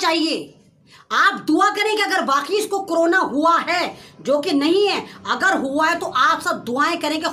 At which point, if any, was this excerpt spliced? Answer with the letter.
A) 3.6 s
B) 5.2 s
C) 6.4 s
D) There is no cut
D